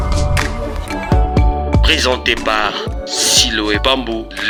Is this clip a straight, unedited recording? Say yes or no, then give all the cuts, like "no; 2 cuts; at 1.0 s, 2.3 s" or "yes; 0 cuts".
yes; 0 cuts